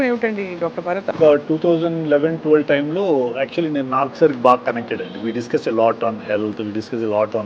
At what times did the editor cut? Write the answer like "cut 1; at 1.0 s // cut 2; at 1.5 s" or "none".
cut 1; at 1.1 s